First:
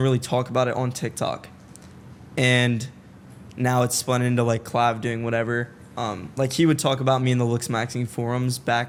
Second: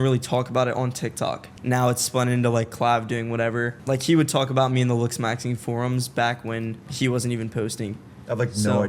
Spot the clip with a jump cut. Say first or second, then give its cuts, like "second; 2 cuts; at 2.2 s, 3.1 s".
second; 3 cuts; at 1.5 s, 3.8 s, 6.9 s